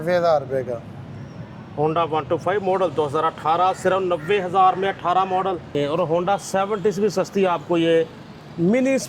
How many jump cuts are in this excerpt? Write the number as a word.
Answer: one